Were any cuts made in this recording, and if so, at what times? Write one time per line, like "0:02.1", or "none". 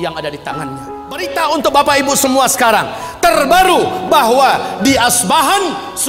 0:01.3